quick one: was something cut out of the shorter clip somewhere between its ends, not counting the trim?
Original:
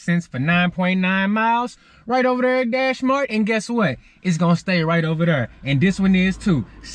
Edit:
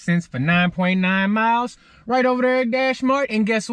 no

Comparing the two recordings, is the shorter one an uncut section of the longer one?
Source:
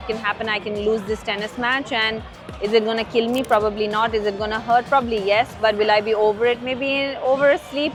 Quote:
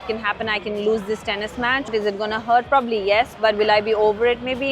no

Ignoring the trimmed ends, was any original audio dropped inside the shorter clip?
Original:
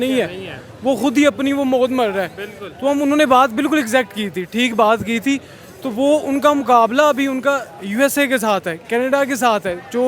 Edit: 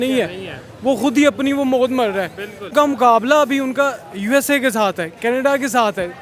yes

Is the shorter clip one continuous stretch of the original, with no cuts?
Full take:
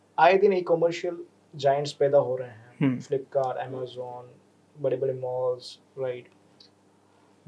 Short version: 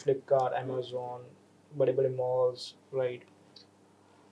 yes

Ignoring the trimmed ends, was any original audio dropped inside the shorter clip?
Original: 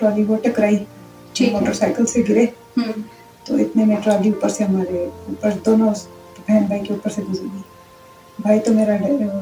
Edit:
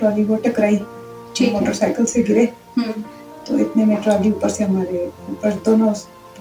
no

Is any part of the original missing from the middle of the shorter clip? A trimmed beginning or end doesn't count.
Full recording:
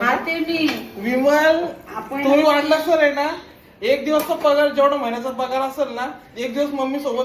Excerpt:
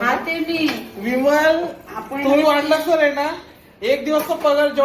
no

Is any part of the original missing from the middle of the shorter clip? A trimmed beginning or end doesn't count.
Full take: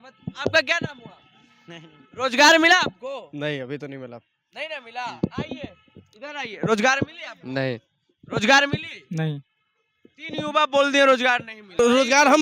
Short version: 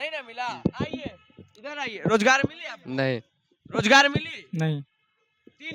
no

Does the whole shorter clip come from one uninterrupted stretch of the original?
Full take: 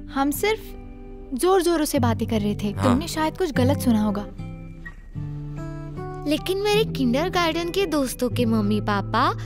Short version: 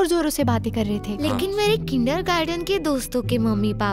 no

